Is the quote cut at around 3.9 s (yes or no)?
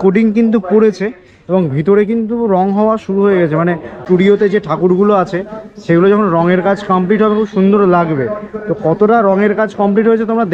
yes